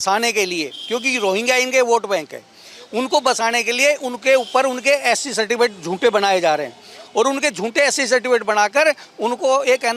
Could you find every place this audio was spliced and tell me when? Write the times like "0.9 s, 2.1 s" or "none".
none